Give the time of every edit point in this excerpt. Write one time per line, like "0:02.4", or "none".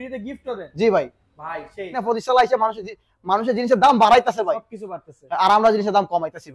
0:02.0